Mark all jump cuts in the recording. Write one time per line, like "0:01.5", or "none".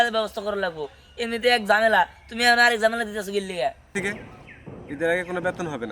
0:03.9